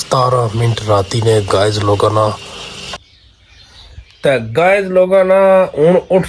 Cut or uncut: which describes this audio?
cut